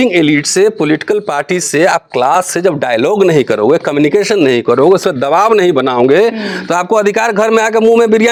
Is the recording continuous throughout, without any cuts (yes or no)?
yes